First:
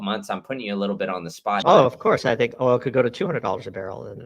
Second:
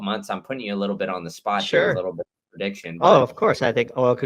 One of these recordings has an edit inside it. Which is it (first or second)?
first